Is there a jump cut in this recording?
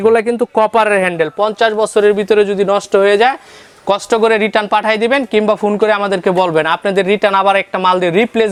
no; 0 cuts

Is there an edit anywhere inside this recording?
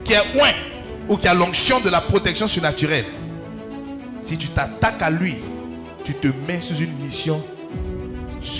no; 0 cuts

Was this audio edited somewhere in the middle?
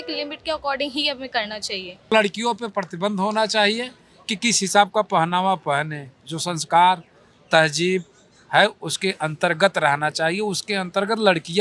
yes; 1 cut; at 2.1 s

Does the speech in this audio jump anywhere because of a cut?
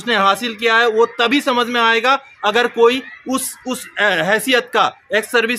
no; 0 cuts

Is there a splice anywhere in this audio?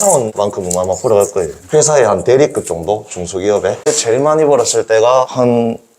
yes; 1 cut; at 3.9 s

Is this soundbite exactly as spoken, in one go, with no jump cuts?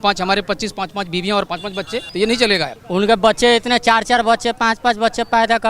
no; 2 cuts; at 2.1 s, 2.8 s

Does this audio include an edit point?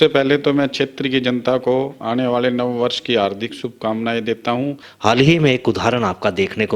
yes; 1 cut; at 4.9 s

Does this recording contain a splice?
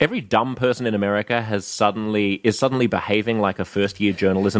no; 0 cuts

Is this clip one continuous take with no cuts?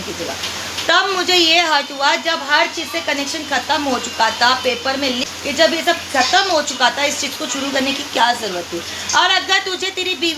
no; 1 cut; at 5.3 s

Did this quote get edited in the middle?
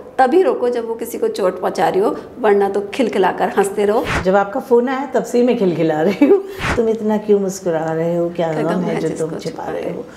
yes; 2 cuts; at 4.1 s, 6.6 s

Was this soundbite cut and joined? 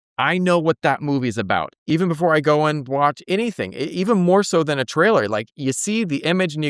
yes; 1 cut; at 1.8 s

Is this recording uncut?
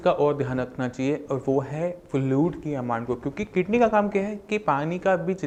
yes; 0 cuts

